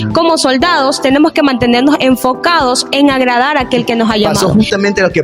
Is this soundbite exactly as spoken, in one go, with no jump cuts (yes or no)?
no